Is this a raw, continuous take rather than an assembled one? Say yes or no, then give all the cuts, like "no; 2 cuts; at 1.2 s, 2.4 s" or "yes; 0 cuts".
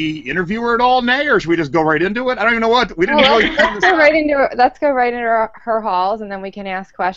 no; 1 cut; at 6.1 s